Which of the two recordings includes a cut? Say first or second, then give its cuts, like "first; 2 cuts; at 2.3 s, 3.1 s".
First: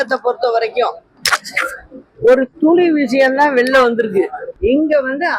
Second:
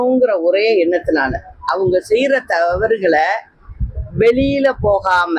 first; 1 cut; at 4.4 s